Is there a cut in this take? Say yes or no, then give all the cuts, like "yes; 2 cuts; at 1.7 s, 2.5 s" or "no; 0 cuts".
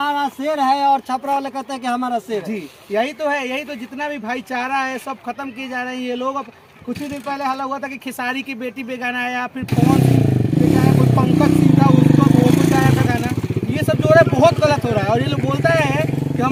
no; 0 cuts